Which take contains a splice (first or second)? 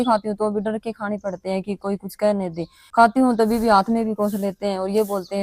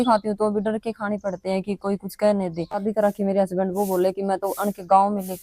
second